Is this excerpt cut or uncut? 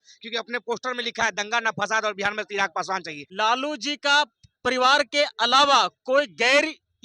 cut